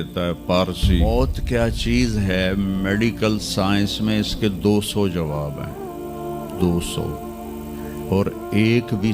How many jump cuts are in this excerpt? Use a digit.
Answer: 1